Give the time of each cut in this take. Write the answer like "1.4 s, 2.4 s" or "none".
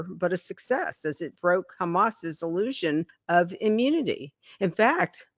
3.2 s